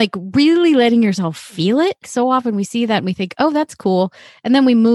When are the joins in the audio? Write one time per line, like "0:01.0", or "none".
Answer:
0:02.1

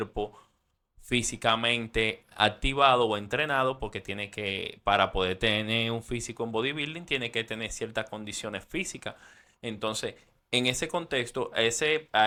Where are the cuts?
none

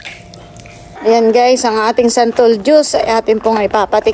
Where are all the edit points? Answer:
0:00.9

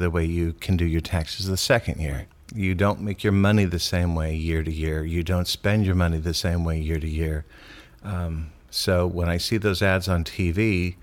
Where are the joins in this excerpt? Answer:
none

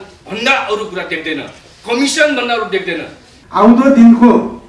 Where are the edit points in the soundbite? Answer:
0:03.4

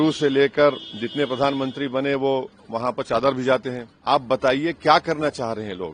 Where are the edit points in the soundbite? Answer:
0:03.9

